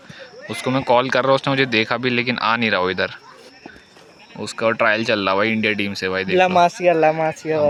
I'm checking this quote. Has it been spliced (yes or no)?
no